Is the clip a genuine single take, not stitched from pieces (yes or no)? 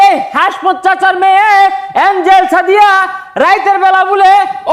yes